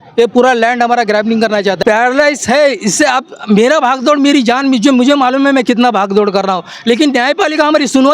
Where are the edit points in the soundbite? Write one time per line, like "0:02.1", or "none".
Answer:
0:01.8